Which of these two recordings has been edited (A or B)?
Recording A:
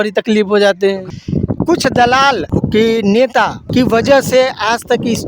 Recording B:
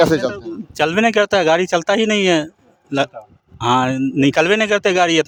A